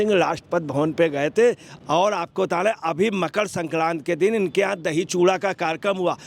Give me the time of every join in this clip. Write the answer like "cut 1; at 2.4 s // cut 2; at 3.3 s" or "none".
cut 1; at 1.7 s